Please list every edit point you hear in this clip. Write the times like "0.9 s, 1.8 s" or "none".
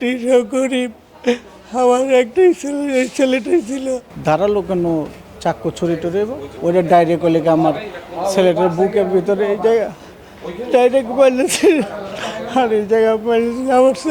4.1 s, 6.5 s